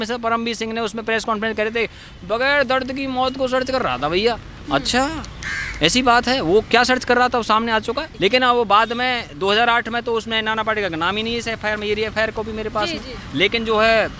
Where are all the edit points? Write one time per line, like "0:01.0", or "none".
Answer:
0:08.1